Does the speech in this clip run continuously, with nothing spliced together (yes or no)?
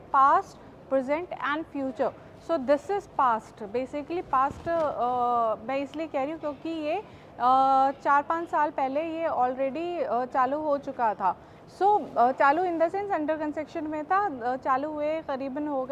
yes